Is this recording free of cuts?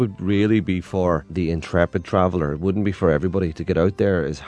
no; 1 cut; at 1.3 s

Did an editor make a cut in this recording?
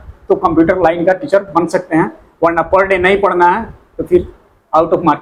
no; 0 cuts

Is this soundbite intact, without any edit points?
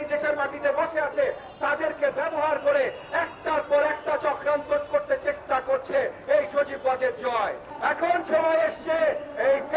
no; 1 cut; at 7.7 s

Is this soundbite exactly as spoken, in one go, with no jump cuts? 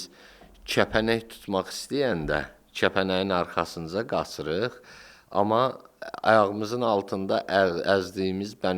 yes; 0 cuts

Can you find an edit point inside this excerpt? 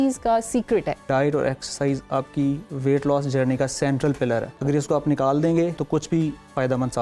yes; 3 cuts; at 1.1 s, 4.5 s, 5.8 s

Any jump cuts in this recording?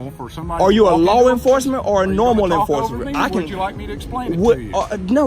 no; 0 cuts

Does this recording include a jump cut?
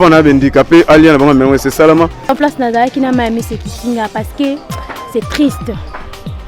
yes; 1 cut; at 2.3 s

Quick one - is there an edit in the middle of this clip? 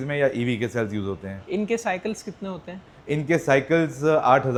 no; 0 cuts

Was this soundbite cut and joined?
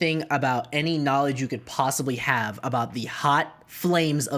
no; 0 cuts

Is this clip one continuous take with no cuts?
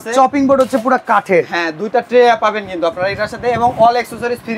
yes; 0 cuts

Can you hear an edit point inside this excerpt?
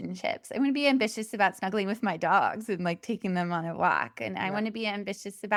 no; 0 cuts

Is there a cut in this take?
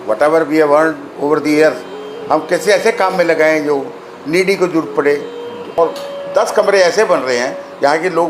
yes; 1 cut; at 5.7 s

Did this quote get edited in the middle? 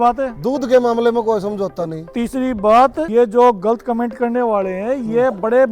yes; 1 cut; at 3.1 s

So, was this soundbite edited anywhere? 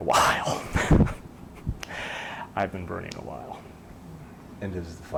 no; 0 cuts

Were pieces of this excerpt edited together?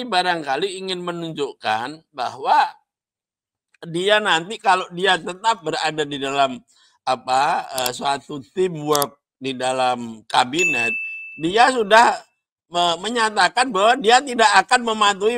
no; 0 cuts

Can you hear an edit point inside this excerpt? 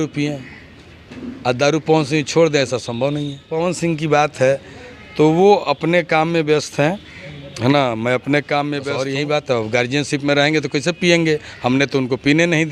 yes; 2 cuts; at 3.5 s, 8.9 s

